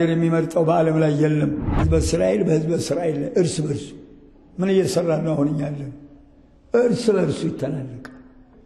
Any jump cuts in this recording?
yes; 1 cut; at 1.7 s

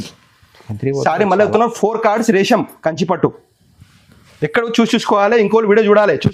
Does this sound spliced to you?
no; 0 cuts

